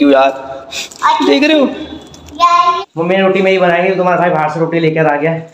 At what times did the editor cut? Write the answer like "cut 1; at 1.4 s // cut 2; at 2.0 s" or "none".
cut 1; at 2.8 s